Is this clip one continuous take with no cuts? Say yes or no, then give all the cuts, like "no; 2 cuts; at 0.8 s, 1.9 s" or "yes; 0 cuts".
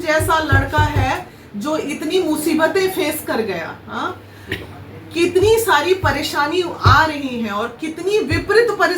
yes; 0 cuts